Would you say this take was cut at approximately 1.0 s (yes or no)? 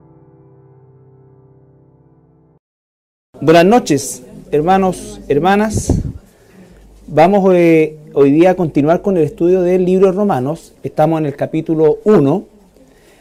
no